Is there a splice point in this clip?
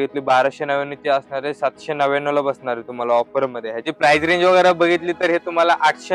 yes; 1 cut; at 3.8 s

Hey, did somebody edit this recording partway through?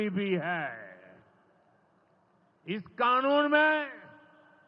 no; 0 cuts

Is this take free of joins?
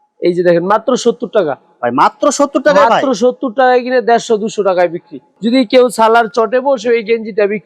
no; 1 cut; at 5.3 s

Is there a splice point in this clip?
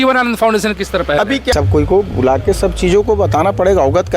yes; 1 cut; at 1.5 s

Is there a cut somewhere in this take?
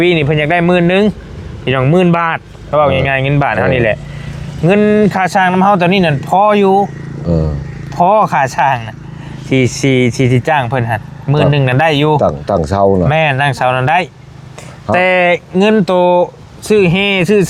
no; 0 cuts

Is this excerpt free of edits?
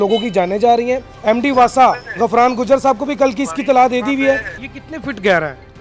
no; 2 cuts; at 1.1 s, 4.5 s

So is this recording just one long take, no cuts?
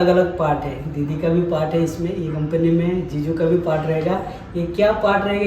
yes; 0 cuts

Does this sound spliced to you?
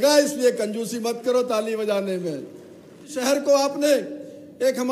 yes; 1 cut; at 3.2 s

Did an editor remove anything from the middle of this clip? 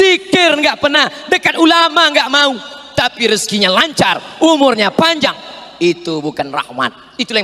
no; 0 cuts

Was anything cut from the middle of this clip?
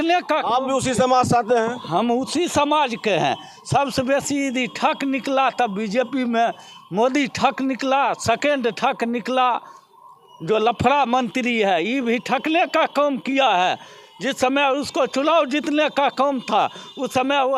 no; 0 cuts

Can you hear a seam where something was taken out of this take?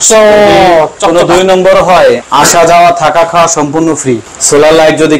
yes; 2 cuts; at 2.2 s, 4.3 s

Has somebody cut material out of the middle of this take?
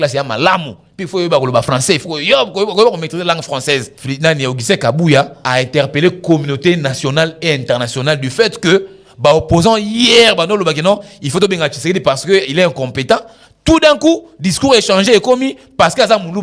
yes; 2 cuts; at 4.0 s, 5.4 s

